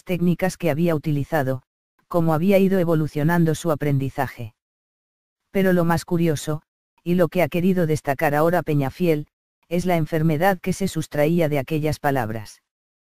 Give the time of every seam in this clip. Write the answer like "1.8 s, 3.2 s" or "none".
4.3 s